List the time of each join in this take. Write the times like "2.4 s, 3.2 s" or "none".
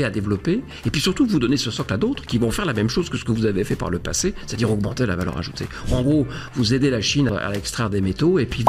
7.3 s

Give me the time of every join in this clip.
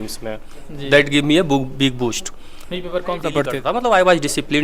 3.6 s

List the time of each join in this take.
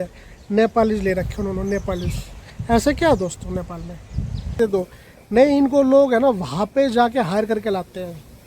4.6 s

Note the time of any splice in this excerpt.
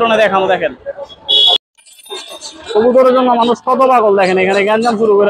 1.6 s

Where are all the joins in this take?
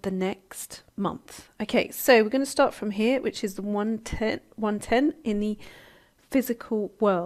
6.0 s

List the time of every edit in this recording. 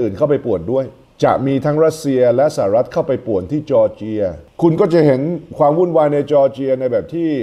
1.0 s

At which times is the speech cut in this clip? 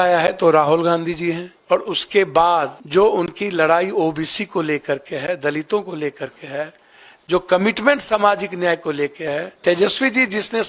1.5 s, 2.8 s, 9.5 s

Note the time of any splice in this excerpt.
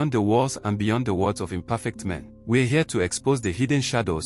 2.3 s

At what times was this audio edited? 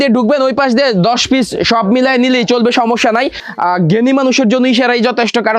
3.4 s

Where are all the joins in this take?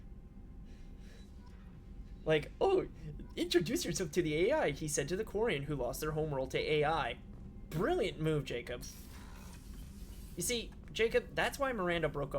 9.8 s

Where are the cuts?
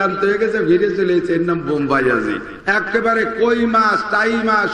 2.5 s

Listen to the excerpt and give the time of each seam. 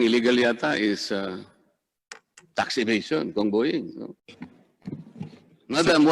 4.2 s

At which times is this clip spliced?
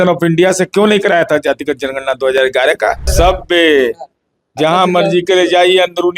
3.1 s

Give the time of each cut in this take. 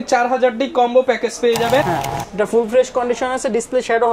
1.8 s

